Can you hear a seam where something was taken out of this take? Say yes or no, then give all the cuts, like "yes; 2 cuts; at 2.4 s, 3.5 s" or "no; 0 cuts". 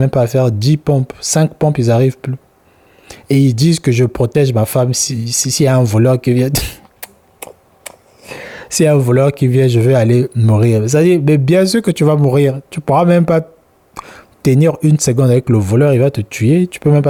no; 0 cuts